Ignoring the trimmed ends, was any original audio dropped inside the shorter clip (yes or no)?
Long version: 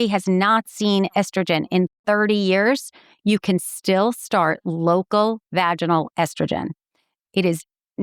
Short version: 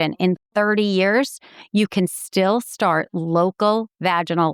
no